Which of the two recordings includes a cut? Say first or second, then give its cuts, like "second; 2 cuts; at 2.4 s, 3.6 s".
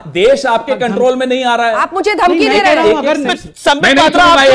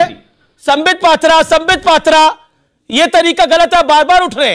first; 1 cut; at 3.3 s